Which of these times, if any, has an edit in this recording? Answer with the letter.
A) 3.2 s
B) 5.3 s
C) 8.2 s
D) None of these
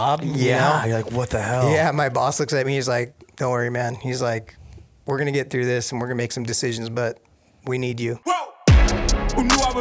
C